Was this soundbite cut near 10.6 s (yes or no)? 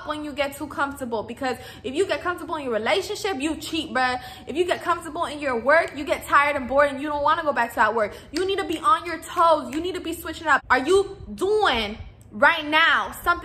yes